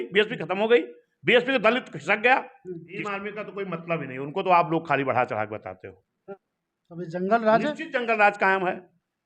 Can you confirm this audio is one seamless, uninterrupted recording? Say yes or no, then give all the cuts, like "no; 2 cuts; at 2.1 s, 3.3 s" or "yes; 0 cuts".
no; 2 cuts; at 2.9 s, 6.3 s